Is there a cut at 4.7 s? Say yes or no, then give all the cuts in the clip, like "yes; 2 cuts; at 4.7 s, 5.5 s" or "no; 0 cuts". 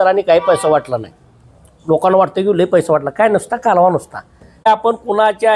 yes; 1 cut; at 4.7 s